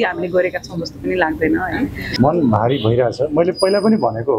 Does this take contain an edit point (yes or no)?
yes